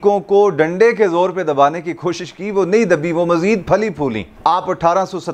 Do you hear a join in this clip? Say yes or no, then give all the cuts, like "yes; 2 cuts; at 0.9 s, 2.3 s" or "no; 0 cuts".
no; 0 cuts